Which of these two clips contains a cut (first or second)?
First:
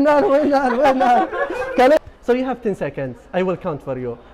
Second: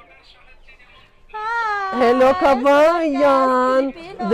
first